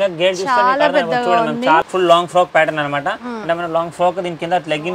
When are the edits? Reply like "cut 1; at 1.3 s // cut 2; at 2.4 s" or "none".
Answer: cut 1; at 1.8 s